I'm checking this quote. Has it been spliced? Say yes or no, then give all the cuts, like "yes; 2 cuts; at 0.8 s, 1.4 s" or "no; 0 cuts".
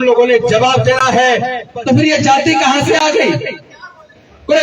yes; 1 cut; at 1.6 s